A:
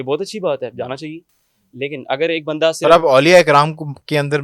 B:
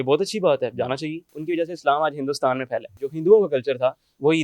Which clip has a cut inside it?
B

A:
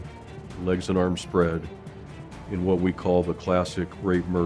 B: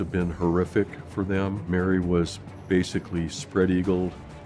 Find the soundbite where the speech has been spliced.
B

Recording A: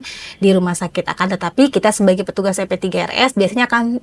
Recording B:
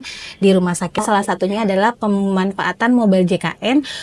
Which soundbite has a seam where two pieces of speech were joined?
B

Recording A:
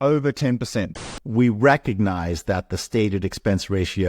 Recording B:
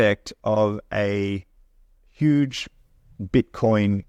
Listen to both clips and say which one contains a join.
A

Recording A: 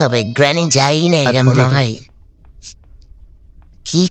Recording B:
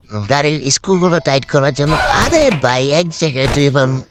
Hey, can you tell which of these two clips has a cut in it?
A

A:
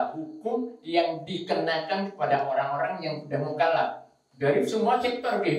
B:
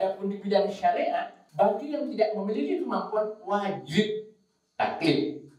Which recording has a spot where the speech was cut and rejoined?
B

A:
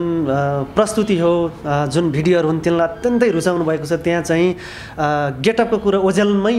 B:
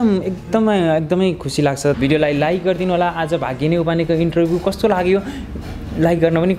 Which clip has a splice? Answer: B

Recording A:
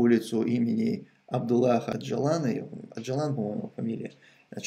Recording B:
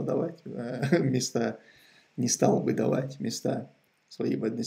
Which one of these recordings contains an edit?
A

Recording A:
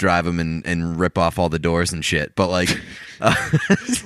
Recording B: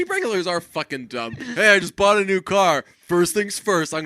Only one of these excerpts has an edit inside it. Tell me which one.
B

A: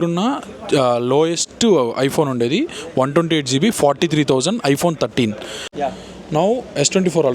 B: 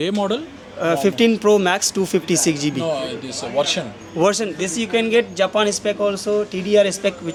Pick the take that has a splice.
A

